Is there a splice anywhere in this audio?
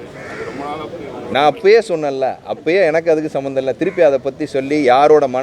no; 0 cuts

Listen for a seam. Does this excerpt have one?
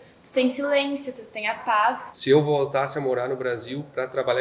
yes; 1 cut; at 2.0 s

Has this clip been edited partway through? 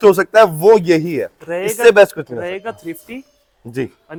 no; 0 cuts

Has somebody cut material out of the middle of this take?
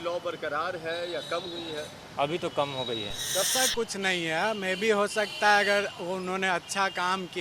yes; 1 cut; at 3.5 s

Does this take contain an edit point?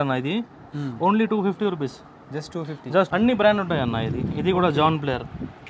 yes; 1 cut; at 3.1 s

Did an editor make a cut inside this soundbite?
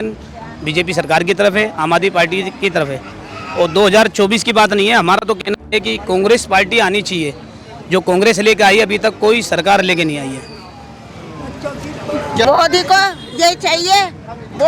yes; 1 cut; at 12.5 s

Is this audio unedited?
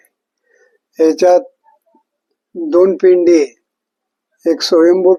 yes; 0 cuts

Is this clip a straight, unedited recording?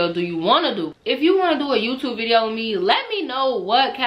no; 1 cut; at 0.9 s

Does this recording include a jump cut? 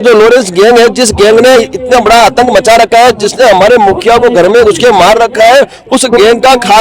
no; 0 cuts

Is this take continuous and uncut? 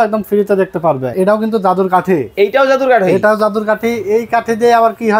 no; 1 cut; at 1.1 s

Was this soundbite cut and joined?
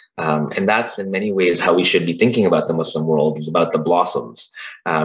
no; 0 cuts

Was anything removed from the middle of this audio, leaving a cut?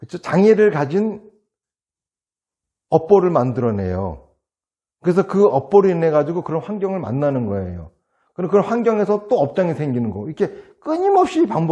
no; 0 cuts

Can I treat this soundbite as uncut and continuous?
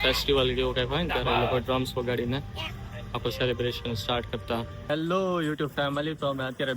no; 1 cut; at 4.8 s

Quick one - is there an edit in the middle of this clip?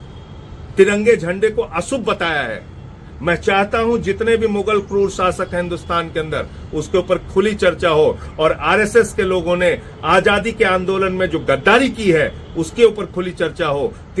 no; 0 cuts

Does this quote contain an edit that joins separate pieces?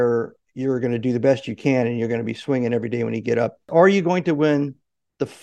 yes; 1 cut; at 3.7 s

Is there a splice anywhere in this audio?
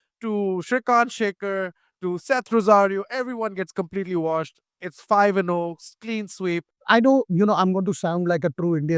yes; 1 cut; at 6.7 s

